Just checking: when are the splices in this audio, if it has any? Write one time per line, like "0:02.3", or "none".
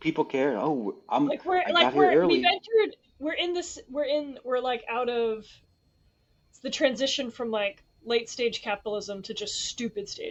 none